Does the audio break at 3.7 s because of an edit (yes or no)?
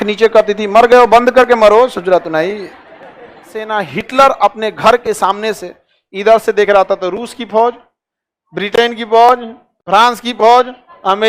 yes